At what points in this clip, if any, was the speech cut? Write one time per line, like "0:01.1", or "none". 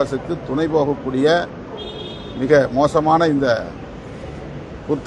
none

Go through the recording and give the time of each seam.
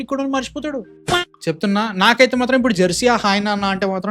0:01.0

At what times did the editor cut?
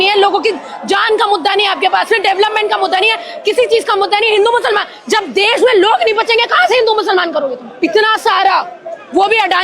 0:07.7

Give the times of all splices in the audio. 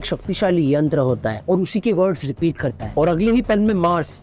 0:01.4

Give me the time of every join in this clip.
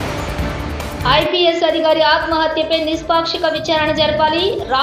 none

